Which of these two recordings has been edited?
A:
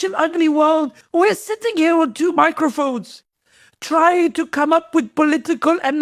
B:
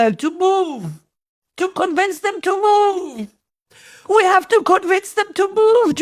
A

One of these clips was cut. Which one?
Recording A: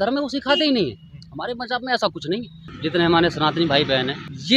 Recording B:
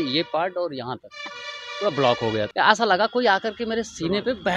A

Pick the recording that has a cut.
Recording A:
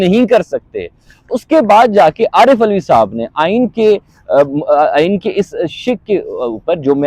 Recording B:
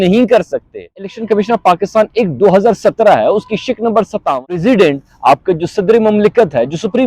B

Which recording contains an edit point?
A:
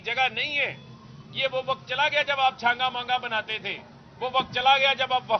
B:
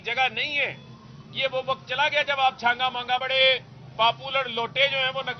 B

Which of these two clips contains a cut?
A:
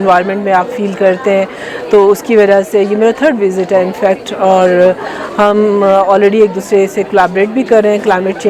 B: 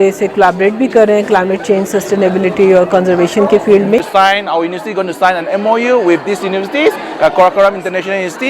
B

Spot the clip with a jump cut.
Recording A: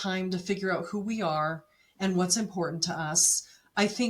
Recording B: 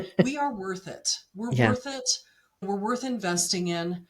B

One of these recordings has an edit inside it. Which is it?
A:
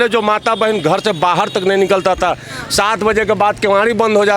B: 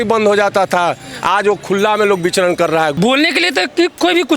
B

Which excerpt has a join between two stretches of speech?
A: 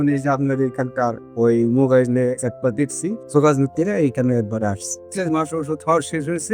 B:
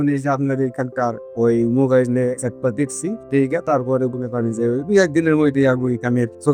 A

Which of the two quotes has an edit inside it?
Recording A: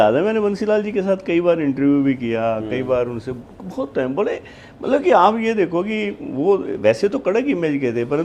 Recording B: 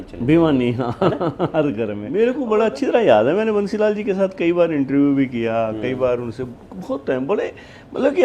B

